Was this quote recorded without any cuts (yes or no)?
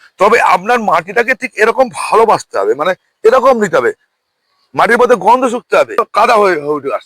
no